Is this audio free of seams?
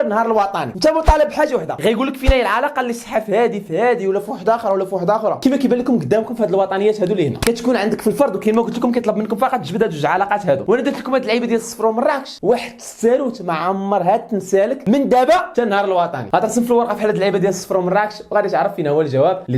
yes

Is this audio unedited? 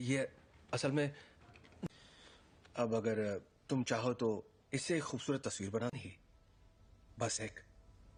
yes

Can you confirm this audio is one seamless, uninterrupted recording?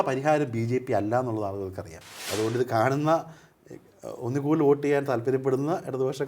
no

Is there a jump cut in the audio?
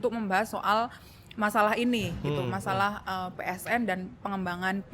no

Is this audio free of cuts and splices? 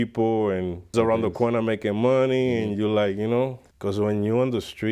no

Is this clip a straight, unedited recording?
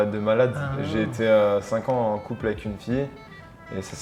yes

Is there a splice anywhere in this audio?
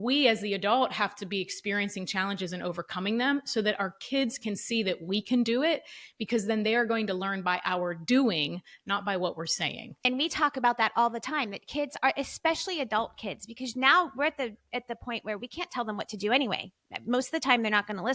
yes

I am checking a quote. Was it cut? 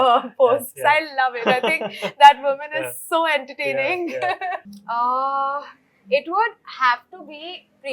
yes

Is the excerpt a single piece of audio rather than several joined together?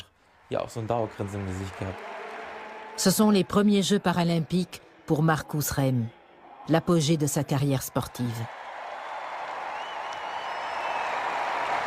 no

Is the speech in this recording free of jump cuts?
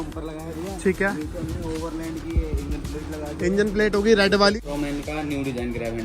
no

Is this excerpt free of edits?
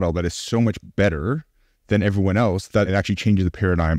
no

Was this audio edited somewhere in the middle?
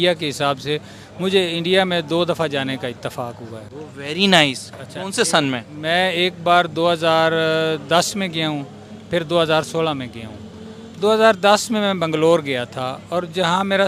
no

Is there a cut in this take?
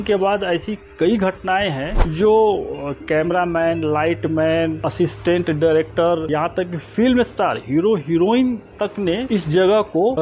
no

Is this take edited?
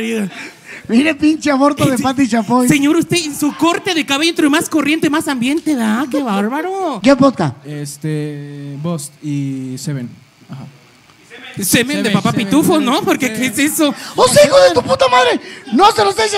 yes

